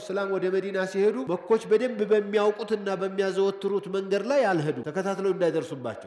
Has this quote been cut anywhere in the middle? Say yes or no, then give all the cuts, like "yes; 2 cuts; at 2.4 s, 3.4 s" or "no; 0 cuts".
yes; 2 cuts; at 1.2 s, 4.8 s